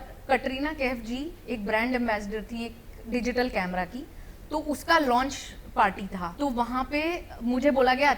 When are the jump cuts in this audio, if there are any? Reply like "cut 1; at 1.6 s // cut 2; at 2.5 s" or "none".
cut 1; at 6.3 s